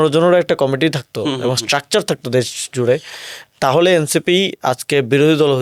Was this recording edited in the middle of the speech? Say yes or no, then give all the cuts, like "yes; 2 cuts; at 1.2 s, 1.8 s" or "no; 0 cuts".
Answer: no; 0 cuts